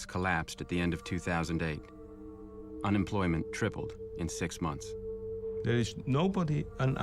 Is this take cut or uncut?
cut